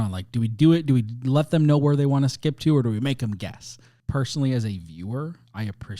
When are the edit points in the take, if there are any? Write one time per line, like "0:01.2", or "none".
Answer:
0:03.9